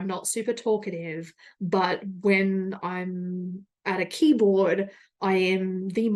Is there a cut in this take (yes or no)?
no